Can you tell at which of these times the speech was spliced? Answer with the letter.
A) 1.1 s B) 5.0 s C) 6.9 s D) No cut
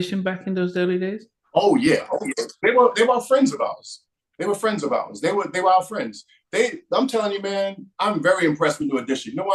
D